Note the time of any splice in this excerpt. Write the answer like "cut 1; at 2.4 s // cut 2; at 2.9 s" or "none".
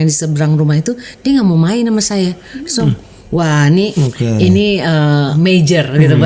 cut 1; at 3.9 s // cut 2; at 5.3 s